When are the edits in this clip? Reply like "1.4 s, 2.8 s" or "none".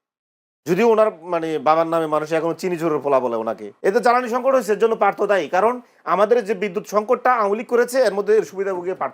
3.7 s